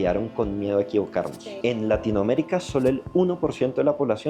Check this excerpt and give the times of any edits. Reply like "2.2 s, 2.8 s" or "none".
1.4 s